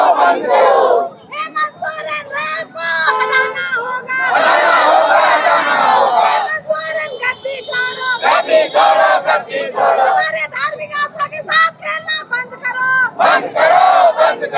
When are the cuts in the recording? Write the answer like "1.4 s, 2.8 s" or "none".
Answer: none